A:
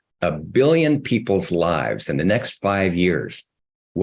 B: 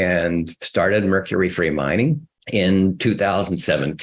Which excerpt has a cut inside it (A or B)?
B